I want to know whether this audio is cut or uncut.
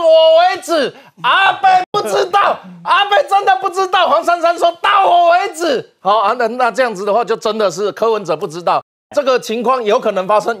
uncut